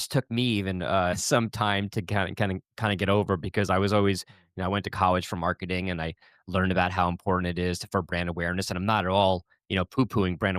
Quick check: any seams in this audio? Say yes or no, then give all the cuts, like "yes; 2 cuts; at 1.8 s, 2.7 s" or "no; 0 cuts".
yes; 1 cut; at 1.2 s